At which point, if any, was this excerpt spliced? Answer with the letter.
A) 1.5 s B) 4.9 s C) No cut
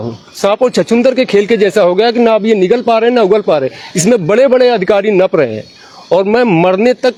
C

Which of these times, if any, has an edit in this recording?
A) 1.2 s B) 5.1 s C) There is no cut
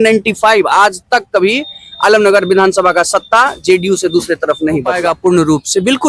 B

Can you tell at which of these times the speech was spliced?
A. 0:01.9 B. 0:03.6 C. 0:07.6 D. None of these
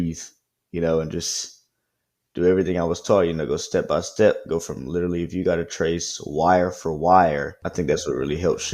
C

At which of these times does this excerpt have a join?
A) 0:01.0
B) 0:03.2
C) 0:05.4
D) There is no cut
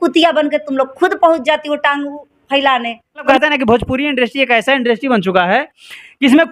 B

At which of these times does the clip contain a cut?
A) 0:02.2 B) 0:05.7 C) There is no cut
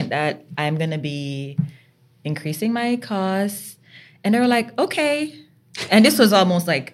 C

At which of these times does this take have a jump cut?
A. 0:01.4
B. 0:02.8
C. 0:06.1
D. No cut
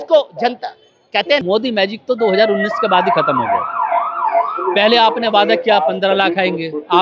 A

